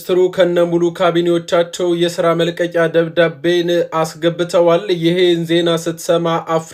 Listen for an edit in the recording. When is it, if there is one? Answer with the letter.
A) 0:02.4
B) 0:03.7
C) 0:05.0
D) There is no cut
D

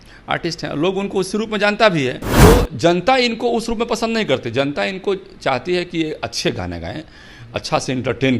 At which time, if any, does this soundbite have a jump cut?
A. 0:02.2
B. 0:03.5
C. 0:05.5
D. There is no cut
A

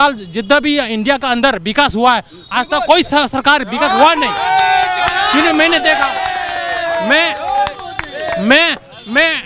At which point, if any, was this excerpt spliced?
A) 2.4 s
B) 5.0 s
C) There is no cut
C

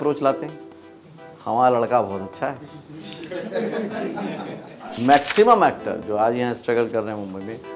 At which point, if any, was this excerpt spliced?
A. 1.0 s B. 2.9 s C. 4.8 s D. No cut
C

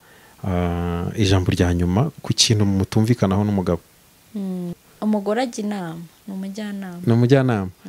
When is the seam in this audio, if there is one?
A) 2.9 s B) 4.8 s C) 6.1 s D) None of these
B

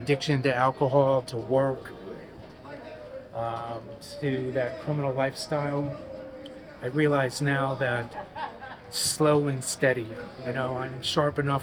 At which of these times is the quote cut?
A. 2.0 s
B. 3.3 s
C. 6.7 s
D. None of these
D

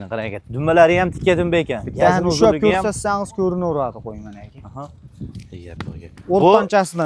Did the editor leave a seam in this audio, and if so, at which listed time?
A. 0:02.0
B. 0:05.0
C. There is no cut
C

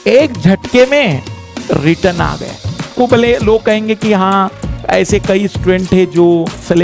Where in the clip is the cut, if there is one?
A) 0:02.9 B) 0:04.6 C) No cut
A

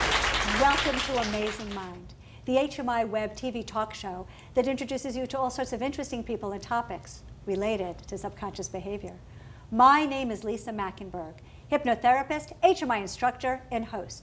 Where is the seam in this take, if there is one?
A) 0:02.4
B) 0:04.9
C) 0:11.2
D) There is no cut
A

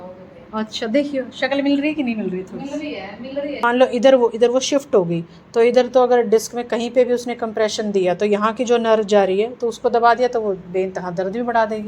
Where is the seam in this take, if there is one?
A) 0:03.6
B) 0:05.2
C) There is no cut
A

